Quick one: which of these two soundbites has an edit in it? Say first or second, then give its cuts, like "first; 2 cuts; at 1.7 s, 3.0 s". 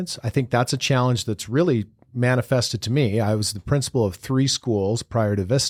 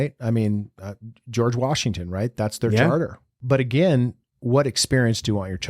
second; 1 cut; at 3.4 s